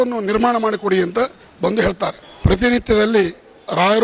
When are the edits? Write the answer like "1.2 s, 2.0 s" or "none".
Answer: 2.3 s